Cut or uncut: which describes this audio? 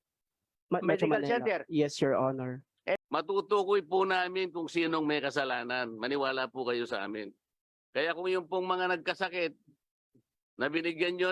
cut